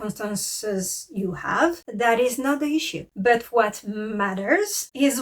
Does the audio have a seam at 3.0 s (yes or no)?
yes